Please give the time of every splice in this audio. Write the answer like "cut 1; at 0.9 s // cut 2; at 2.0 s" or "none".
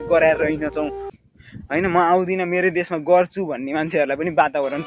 cut 1; at 1.1 s

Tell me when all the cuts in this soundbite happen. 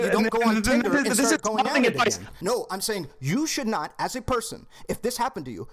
cut 1; at 2.3 s

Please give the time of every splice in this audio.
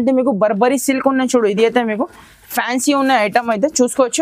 none

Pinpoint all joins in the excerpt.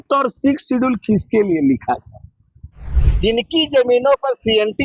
cut 1; at 3.0 s

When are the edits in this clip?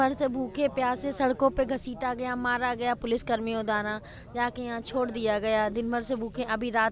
none

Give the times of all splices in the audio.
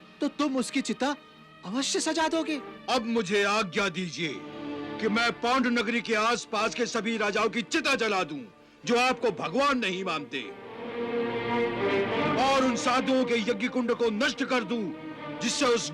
cut 1; at 2.7 s // cut 2; at 10.8 s // cut 3; at 12.2 s

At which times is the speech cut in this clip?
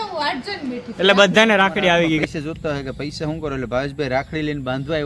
cut 1; at 2.2 s

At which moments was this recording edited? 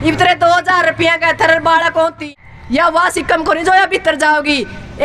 cut 1; at 2.2 s

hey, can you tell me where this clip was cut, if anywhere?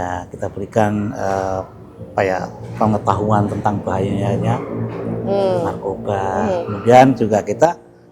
none

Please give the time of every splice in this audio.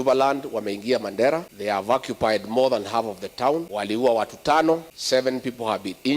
cut 1; at 1.5 s // cut 2; at 3.7 s // cut 3; at 4.9 s

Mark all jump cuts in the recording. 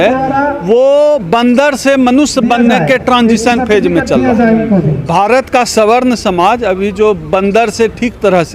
none

